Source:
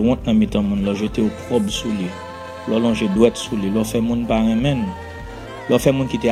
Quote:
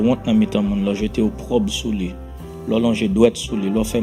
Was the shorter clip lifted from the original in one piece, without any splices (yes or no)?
yes